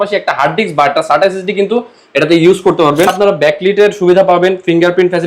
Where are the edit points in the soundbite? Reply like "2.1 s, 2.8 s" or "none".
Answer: 3.1 s